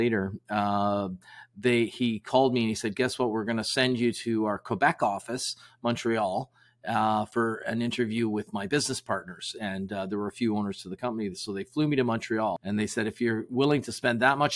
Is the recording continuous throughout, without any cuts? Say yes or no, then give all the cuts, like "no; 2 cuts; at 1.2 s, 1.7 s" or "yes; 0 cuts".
no; 1 cut; at 12.6 s